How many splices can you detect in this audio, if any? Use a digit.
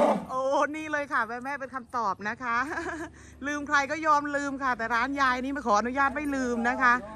0